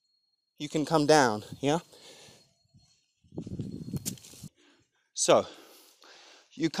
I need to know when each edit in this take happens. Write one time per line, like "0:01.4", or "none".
0:04.3